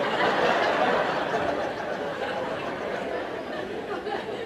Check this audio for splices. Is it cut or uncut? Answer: uncut